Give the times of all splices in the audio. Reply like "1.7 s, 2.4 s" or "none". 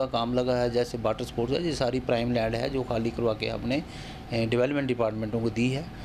none